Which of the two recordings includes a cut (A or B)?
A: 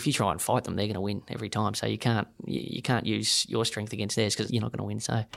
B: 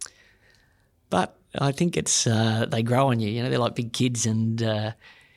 A